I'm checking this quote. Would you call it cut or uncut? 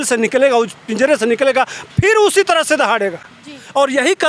uncut